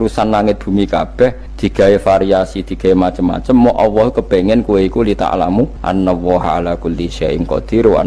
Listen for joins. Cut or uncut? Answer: cut